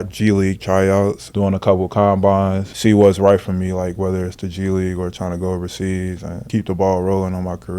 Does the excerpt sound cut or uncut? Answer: cut